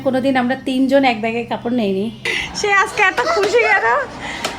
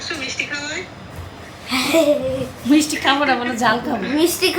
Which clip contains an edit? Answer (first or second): first